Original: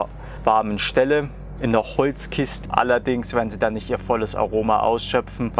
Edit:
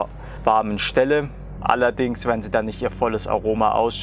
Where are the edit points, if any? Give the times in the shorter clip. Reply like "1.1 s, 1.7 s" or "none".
1.5 s